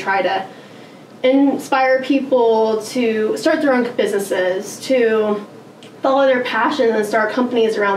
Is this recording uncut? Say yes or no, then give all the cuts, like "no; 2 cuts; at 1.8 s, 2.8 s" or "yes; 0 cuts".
yes; 0 cuts